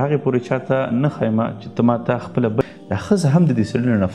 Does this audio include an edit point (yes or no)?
yes